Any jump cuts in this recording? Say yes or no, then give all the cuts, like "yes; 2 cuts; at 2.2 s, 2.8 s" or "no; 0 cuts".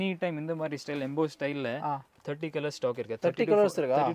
no; 0 cuts